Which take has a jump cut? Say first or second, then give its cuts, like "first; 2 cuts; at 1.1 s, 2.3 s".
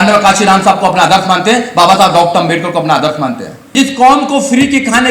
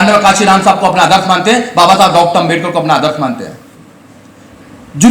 first; 1 cut; at 3.7 s